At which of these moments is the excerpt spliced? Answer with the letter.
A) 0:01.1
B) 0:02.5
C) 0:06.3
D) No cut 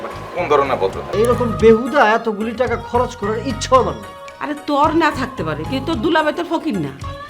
A